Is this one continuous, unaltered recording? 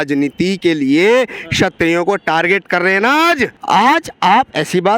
no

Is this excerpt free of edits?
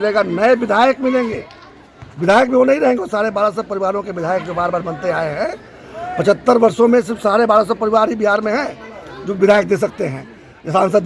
yes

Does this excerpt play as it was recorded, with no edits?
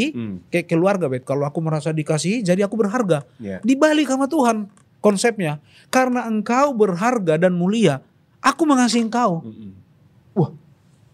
yes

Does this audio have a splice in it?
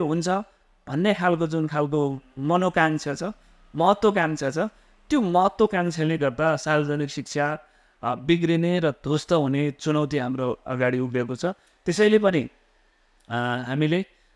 no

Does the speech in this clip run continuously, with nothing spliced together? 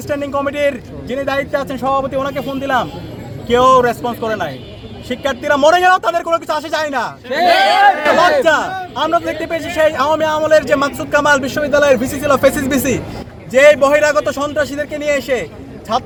yes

